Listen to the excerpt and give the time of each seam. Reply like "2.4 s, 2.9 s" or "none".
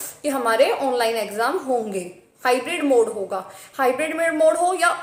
none